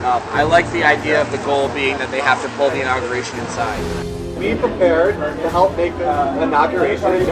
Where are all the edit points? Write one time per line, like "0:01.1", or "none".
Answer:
0:04.0